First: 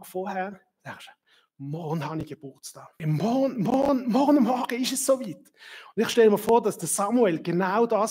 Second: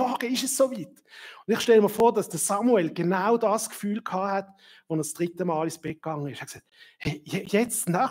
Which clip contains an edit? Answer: first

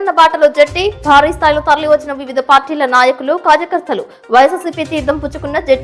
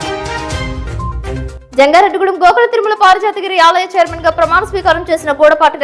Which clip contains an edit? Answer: second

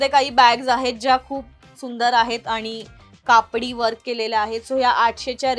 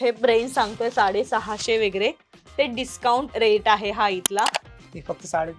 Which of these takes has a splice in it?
second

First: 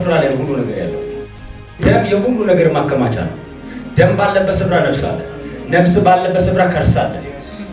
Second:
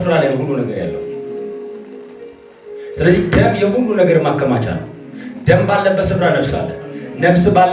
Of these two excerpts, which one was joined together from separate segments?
first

